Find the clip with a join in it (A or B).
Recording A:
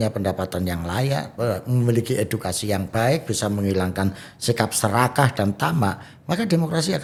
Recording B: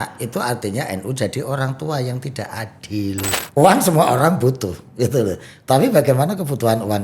B